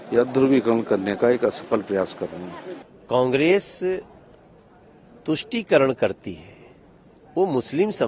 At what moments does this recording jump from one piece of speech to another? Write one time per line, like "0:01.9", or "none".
0:02.4

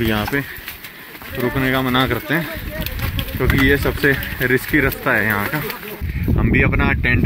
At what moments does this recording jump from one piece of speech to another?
0:06.1

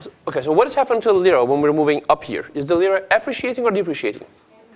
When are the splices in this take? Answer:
0:01.9

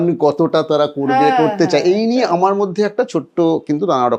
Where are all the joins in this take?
none

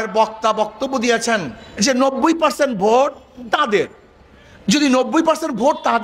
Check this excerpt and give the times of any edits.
0:01.6

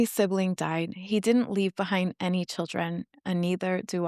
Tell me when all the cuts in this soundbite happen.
none

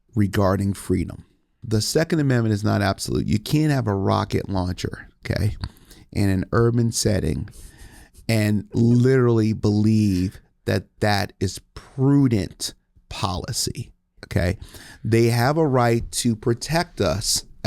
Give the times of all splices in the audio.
0:01.6

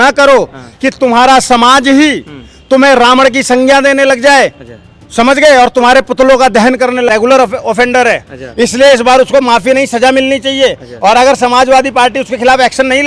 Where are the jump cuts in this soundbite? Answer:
0:07.1

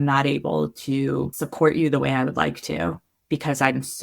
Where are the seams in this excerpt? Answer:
0:01.4

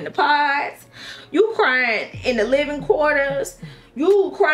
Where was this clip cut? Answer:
none

